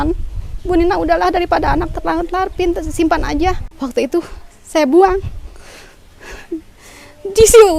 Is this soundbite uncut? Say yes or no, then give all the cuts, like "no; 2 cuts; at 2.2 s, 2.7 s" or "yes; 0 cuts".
no; 1 cut; at 3.7 s